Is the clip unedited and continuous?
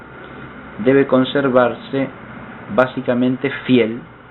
no; 1 cut; at 2.8 s

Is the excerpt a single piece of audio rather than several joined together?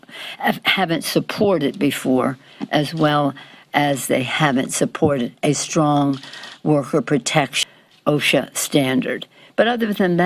no; 1 cut; at 7.6 s

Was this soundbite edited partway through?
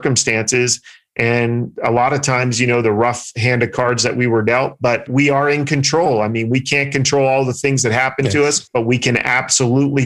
no; 0 cuts

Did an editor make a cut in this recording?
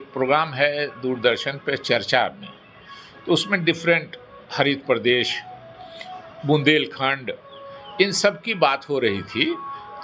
no; 0 cuts

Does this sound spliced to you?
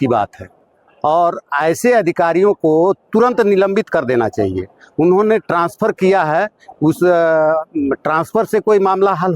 no; 0 cuts

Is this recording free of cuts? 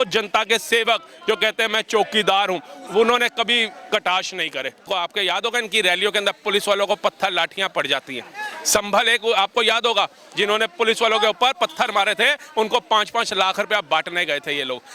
no; 1 cut; at 4.8 s

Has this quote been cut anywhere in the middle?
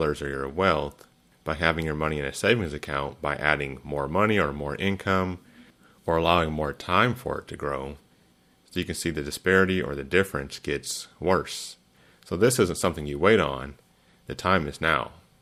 no; 0 cuts

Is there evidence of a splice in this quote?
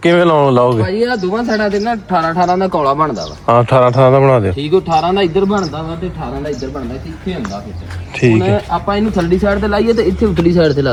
no; 0 cuts

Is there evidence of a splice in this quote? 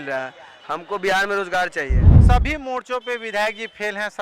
yes; 1 cut; at 2.1 s

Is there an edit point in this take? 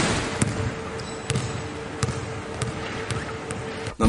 no; 0 cuts

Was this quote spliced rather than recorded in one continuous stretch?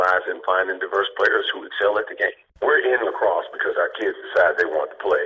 yes; 1 cut; at 2.4 s

